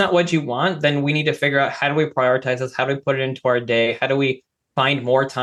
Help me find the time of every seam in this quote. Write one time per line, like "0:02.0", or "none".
none